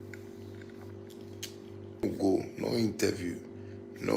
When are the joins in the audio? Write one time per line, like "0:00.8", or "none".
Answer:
0:02.0